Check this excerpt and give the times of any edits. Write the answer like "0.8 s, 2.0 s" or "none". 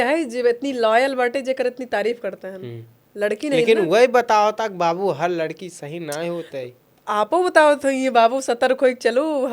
none